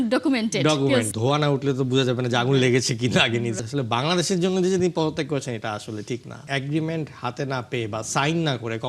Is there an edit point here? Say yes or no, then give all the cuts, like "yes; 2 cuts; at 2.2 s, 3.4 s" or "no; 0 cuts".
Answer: yes; 3 cuts; at 1.1 s, 3.6 s, 6.4 s